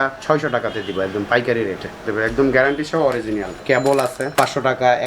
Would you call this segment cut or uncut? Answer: cut